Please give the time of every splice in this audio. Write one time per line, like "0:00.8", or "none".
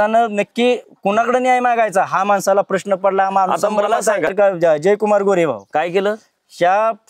0:04.3

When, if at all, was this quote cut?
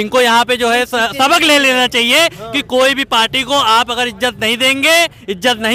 none

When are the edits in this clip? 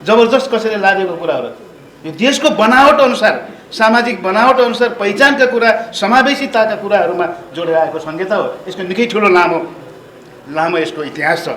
none

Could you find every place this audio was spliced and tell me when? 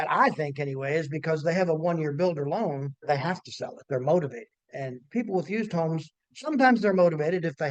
0:03.0
0:04.7

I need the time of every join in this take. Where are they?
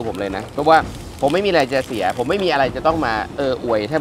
none

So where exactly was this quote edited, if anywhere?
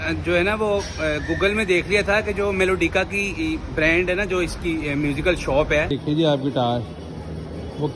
0:06.0

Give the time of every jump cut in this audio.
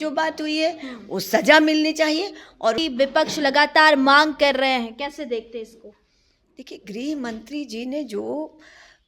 0:02.8

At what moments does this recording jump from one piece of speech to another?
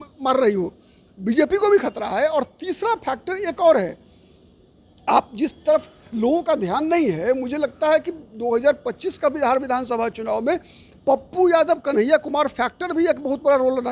none

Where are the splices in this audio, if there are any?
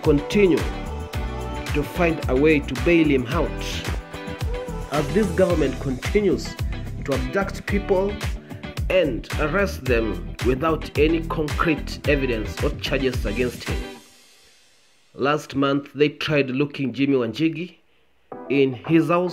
none

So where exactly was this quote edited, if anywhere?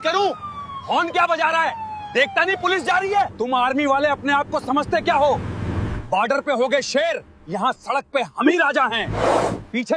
0:03.3

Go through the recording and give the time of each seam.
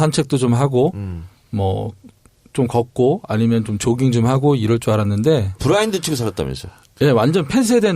0:04.6

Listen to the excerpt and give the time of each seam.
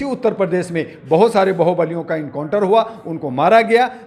none

